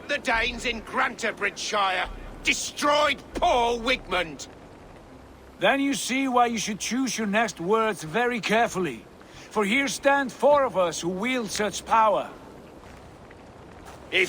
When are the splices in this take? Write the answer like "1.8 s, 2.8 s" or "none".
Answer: 12.8 s

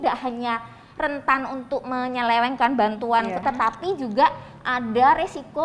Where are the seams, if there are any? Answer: 3.4 s

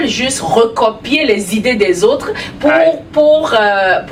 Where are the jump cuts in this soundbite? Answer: none

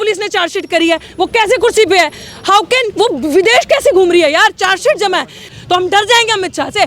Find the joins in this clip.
5.5 s

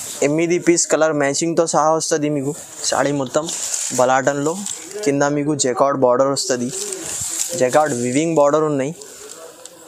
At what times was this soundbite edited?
2.7 s

